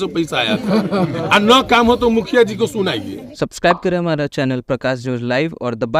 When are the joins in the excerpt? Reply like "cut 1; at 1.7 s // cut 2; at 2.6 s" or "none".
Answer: cut 1; at 3.2 s

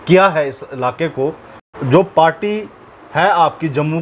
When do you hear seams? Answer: cut 1; at 1.6 s

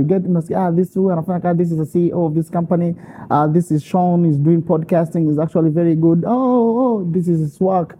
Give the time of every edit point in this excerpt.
none

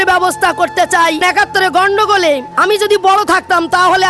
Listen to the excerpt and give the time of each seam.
cut 1; at 1.2 s // cut 2; at 2.5 s

